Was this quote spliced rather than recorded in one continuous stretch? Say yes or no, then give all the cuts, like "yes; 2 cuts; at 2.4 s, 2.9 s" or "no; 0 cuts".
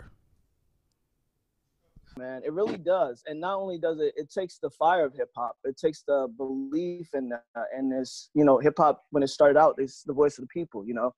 no; 0 cuts